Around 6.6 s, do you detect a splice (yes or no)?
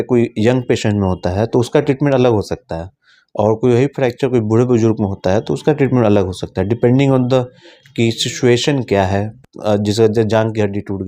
no